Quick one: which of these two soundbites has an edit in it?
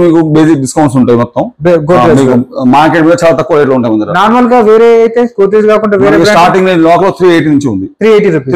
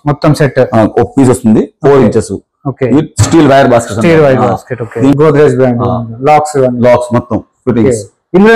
second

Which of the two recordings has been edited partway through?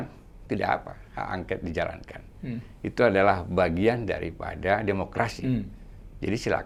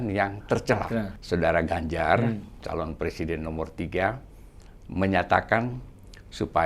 second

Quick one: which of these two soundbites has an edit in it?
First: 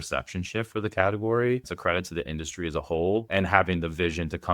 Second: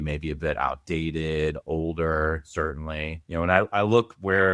first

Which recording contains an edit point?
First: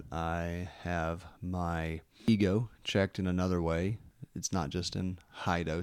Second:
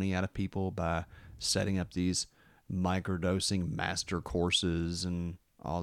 first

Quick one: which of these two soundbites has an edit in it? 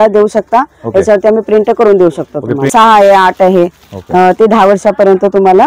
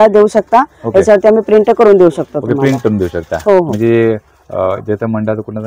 first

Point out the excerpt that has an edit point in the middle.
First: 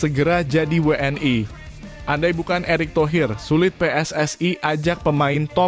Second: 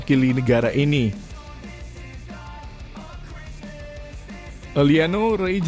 second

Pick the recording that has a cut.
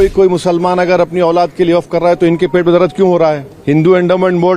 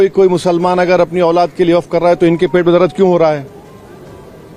first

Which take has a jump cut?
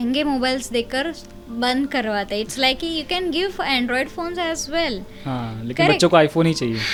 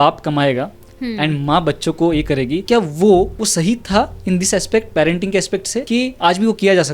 second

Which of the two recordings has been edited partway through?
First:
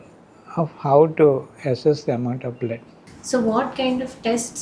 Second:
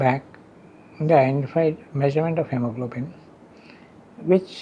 first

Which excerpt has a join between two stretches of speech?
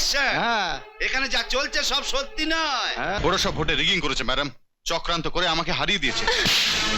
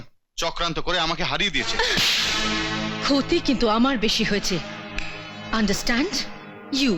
first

